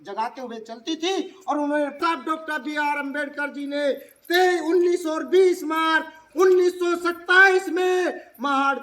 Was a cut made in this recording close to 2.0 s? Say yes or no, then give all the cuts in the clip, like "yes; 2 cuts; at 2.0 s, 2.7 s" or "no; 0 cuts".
yes; 1 cut; at 2.0 s